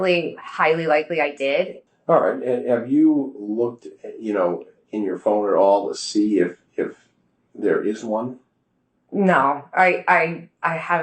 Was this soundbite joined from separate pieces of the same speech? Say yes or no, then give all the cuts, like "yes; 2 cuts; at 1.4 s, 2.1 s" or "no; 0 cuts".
yes; 1 cut; at 1.8 s